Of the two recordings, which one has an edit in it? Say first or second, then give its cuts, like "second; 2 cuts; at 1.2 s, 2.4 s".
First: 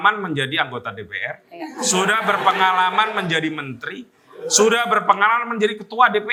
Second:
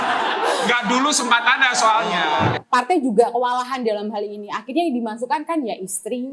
second; 1 cut; at 2.6 s